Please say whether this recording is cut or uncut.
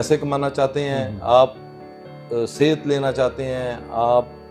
uncut